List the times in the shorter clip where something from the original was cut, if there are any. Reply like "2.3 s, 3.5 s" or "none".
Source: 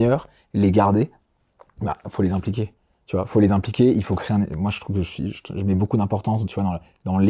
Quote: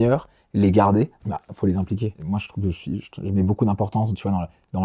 1.2 s, 2.2 s